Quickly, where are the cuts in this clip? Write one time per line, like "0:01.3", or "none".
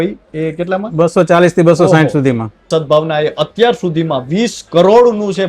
0:02.6